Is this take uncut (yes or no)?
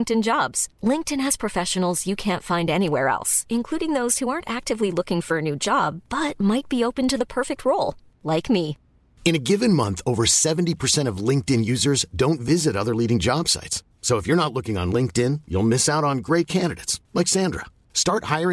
yes